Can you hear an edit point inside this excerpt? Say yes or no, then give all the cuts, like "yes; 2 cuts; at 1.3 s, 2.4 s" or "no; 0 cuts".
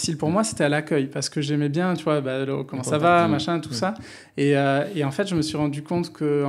no; 0 cuts